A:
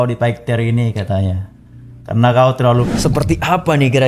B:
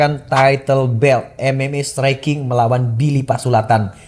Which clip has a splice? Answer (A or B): A